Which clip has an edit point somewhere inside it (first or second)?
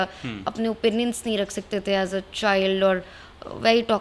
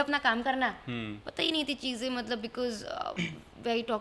second